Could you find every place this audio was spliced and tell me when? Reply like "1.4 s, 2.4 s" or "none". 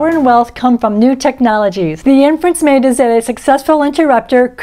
1.9 s